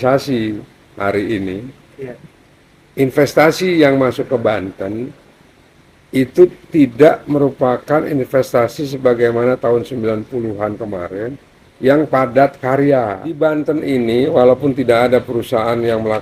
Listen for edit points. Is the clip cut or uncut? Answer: cut